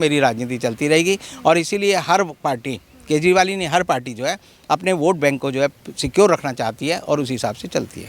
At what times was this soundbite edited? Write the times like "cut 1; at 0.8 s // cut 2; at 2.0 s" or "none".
none